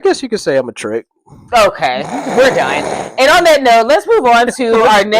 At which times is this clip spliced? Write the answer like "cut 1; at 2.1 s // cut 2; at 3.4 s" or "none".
none